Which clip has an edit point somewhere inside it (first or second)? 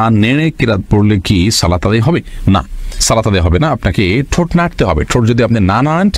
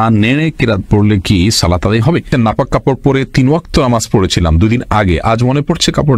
second